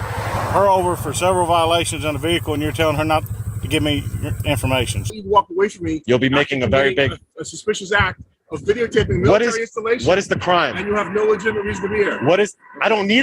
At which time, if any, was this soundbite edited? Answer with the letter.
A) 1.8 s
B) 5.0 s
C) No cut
B